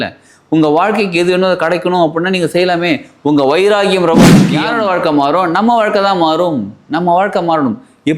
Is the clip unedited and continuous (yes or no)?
no